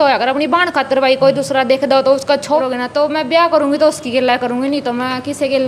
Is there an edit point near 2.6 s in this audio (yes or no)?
yes